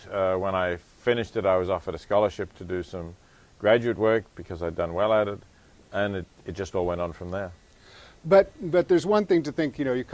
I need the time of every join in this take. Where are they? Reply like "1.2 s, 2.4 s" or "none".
8.4 s